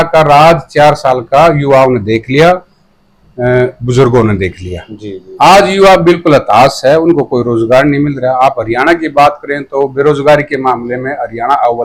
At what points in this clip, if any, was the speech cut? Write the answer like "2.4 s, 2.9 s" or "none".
none